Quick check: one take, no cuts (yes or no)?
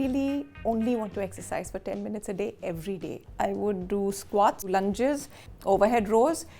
no